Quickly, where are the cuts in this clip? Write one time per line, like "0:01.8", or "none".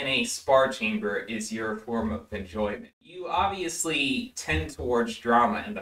0:02.9